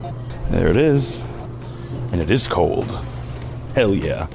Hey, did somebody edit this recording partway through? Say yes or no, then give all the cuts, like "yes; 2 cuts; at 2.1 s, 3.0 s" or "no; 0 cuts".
yes; 1 cut; at 1.3 s